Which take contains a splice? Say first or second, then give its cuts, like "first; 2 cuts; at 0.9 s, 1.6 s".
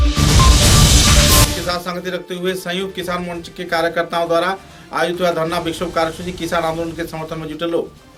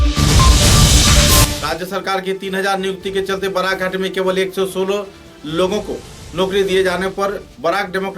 second; 1 cut; at 1.5 s